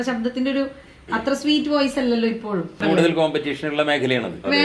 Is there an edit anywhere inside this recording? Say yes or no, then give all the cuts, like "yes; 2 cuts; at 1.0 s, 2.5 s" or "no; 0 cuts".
yes; 1 cut; at 2.8 s